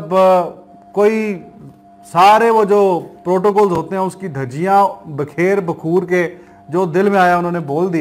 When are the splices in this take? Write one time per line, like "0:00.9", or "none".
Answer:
none